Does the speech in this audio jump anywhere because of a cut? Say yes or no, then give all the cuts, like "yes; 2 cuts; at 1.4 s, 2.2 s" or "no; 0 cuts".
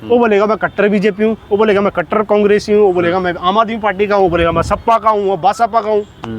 no; 0 cuts